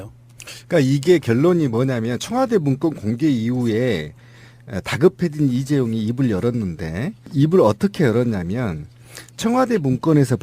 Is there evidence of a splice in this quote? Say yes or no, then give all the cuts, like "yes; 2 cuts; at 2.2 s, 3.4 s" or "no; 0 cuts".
yes; 1 cut; at 2.4 s